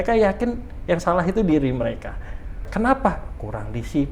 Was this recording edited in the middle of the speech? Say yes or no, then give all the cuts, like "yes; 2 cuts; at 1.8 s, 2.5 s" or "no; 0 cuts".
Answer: yes; 1 cut; at 2.6 s